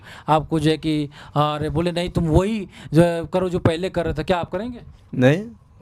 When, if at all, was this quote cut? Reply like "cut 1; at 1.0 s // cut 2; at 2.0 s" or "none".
none